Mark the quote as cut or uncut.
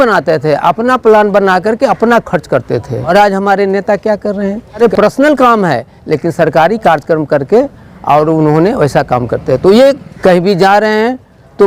cut